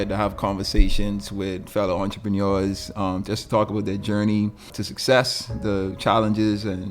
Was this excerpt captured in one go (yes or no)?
no